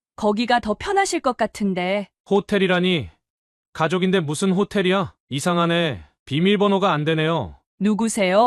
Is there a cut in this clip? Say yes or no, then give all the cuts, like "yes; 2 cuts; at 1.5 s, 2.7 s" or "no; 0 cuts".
yes; 2 cuts; at 5.2 s, 7.6 s